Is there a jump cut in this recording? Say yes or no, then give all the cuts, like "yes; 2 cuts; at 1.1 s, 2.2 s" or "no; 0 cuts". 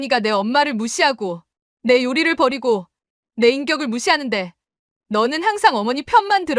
no; 0 cuts